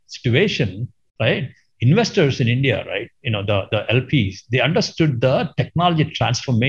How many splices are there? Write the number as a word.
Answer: one